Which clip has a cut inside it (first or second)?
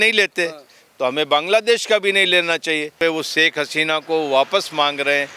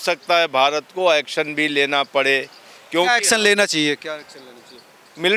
first